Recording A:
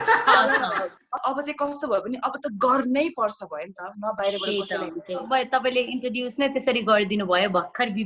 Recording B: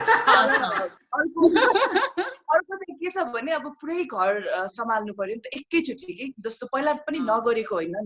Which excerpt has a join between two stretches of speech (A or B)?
A